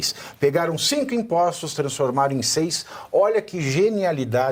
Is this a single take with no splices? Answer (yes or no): yes